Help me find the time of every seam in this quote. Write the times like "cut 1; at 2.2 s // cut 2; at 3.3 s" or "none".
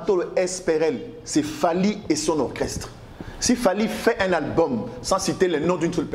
none